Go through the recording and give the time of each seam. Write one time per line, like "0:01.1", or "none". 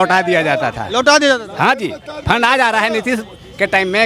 none